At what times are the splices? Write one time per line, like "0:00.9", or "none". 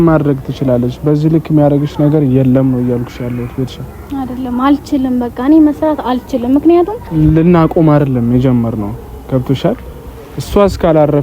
0:07.0